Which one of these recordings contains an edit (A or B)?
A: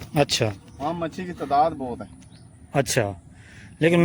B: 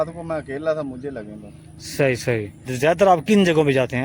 B